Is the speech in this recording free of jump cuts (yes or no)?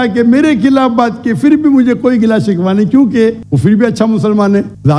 yes